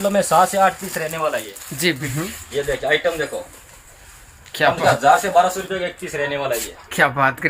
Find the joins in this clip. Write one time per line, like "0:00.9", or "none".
0:02.1